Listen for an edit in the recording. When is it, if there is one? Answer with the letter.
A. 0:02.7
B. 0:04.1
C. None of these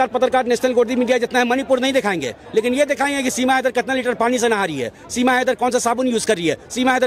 C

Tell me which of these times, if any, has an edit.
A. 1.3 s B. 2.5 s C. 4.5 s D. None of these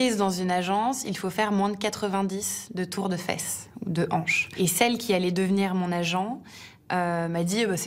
C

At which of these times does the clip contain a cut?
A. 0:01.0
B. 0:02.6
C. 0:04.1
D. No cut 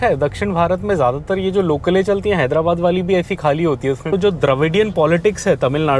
C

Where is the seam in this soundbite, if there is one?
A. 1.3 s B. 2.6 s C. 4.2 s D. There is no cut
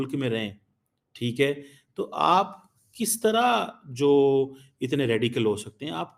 D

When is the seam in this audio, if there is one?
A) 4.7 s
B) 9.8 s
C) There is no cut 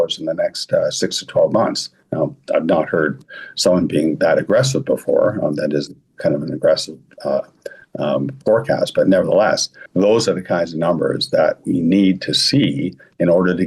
B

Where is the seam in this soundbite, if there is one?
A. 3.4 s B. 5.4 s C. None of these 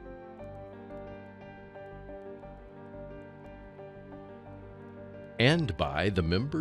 B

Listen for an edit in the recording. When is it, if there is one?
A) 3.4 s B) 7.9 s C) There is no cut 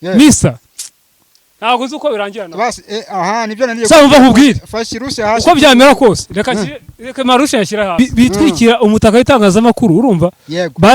B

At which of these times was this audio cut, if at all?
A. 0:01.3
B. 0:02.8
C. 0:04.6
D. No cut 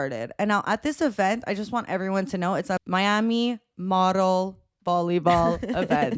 B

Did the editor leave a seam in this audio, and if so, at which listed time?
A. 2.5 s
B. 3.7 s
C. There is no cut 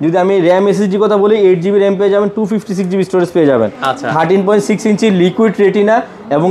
C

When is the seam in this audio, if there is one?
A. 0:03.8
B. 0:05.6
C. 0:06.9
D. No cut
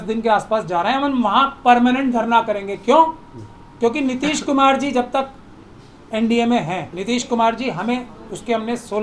C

